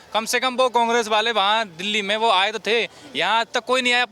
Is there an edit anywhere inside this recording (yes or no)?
no